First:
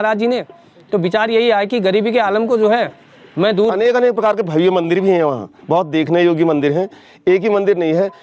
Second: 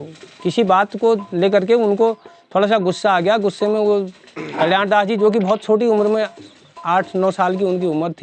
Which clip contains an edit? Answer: first; 1 cut; at 3.7 s

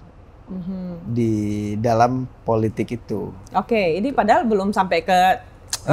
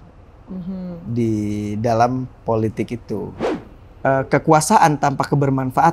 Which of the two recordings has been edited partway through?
second; 1 cut; at 3.4 s

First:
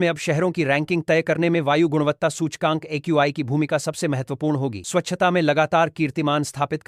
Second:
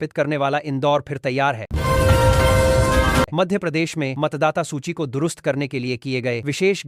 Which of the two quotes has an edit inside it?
second; 2 cuts; at 1.7 s, 3.3 s

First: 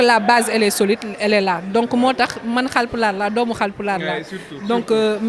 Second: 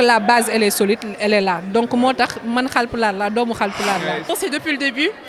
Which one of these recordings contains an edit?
second; 1 cut; at 4.3 s

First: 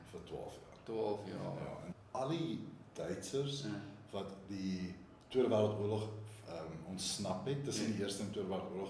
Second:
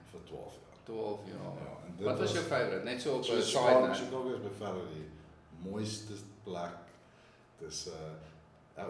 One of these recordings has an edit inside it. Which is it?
first; 1 cut; at 1.8 s

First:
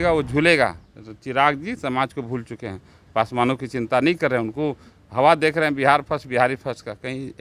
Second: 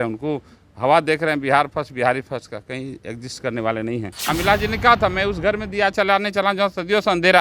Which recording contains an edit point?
second; 1 cut; at 4.2 s

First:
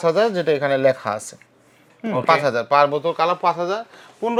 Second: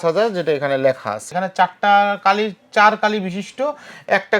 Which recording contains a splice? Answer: second; 1 cut; at 1.3 s

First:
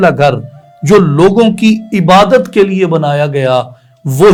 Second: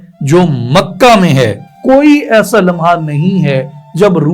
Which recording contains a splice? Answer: second; 1 cut; at 1.7 s

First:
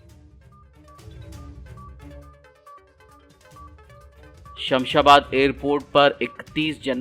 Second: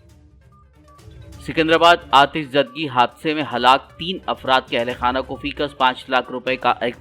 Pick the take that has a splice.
first; 1 cut; at 0.9 s

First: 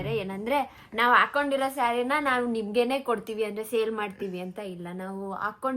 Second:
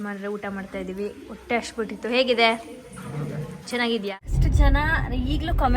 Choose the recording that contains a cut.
second; 1 cut; at 4.1 s

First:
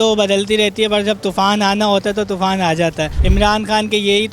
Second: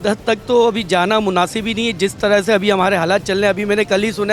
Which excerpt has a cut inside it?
first; 1 cut; at 3.2 s

